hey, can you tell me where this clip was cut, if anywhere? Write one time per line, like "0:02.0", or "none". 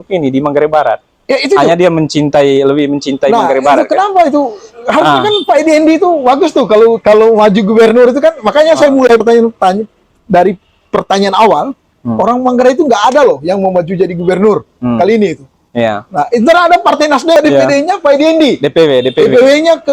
0:17.4